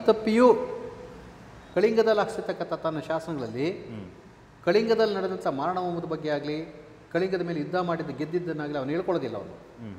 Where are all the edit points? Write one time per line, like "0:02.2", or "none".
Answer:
none